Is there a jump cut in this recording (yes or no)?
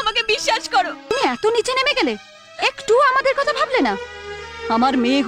yes